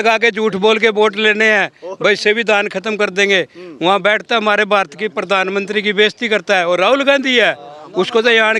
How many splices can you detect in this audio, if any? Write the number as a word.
zero